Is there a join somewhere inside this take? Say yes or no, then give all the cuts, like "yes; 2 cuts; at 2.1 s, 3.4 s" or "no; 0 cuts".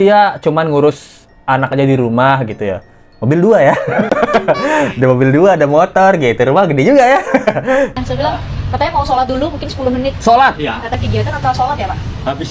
yes; 2 cuts; at 7.9 s, 10.9 s